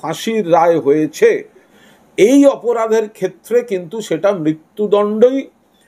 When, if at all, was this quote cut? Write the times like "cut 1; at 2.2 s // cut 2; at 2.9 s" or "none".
cut 1; at 1.7 s